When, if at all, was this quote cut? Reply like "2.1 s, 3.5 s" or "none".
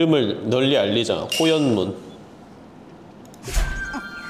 none